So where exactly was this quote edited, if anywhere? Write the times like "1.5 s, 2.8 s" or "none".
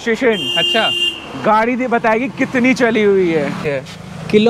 3.6 s